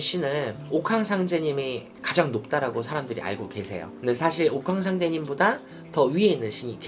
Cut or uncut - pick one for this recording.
uncut